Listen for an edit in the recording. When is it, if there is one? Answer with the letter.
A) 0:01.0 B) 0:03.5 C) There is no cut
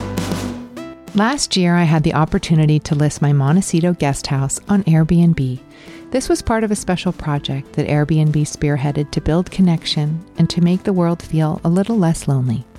A